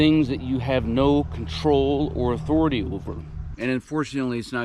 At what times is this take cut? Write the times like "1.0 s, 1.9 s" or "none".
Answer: 3.5 s